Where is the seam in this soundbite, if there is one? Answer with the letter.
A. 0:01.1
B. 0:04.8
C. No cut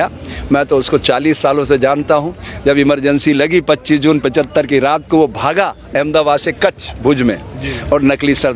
C